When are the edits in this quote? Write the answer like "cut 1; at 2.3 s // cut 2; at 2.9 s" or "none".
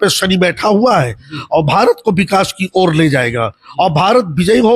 none